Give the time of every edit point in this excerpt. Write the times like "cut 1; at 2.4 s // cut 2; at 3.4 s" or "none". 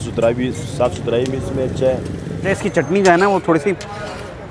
cut 1; at 2.5 s